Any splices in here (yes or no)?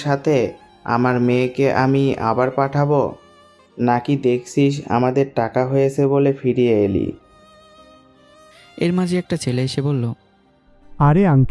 no